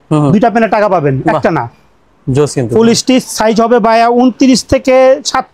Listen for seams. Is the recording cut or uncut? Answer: uncut